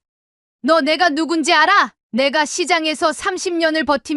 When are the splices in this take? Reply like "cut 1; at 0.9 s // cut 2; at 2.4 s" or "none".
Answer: cut 1; at 2.0 s